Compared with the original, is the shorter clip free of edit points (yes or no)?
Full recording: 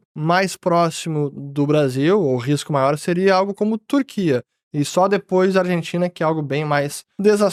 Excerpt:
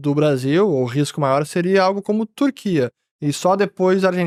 yes